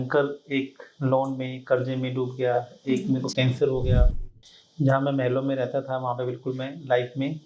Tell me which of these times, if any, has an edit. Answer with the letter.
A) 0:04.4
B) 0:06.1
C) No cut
C